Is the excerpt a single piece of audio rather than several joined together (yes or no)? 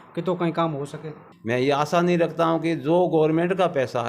no